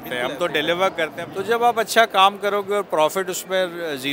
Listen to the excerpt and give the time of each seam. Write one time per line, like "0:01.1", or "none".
0:01.2